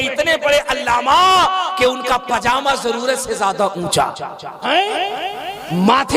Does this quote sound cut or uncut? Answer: cut